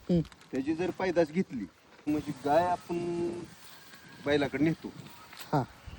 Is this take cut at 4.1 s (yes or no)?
no